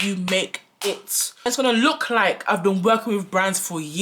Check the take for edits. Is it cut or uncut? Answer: cut